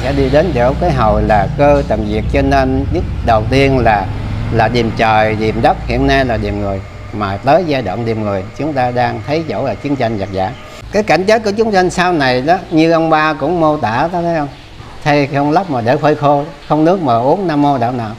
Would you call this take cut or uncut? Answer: cut